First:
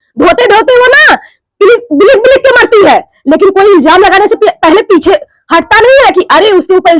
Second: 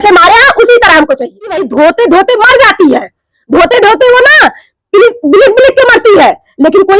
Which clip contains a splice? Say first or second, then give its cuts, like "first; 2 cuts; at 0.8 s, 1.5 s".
second; 1 cut; at 1.7 s